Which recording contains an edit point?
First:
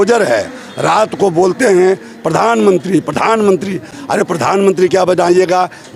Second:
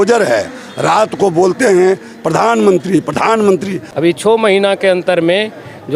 second; 1 cut; at 3.8 s

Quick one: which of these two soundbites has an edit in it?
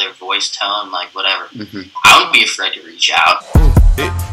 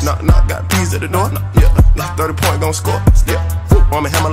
first; 2 cuts; at 1.9 s, 3.4 s

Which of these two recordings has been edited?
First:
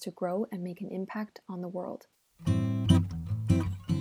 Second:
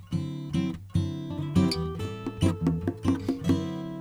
first; 1 cut; at 2.3 s

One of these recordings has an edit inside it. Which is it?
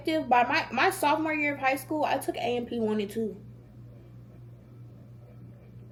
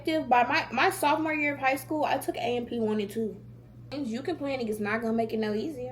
second; 1 cut; at 3.9 s

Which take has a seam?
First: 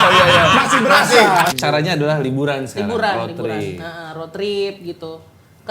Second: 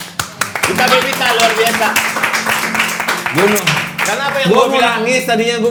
first; 1 cut; at 1.5 s

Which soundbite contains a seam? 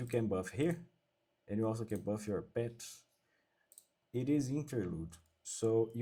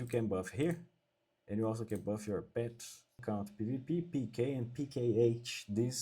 second; 1 cut; at 3.2 s

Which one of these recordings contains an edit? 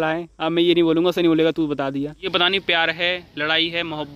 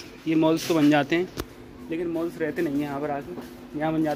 first; 1 cut; at 2.3 s

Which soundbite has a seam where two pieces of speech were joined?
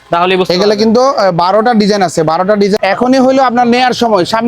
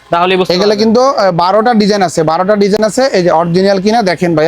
first; 1 cut; at 2.8 s

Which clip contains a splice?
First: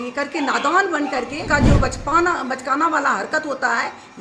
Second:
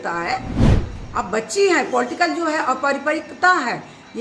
first; 1 cut; at 1.5 s

